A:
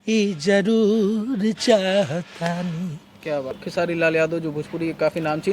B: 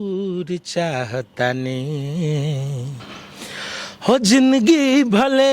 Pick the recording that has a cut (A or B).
A